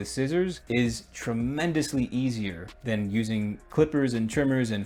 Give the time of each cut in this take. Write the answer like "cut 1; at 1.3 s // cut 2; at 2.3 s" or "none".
none